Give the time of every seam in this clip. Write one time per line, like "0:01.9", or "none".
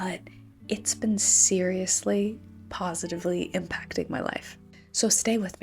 0:04.7